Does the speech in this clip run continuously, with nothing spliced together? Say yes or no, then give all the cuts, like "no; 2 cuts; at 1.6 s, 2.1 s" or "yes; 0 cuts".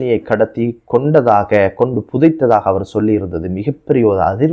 yes; 0 cuts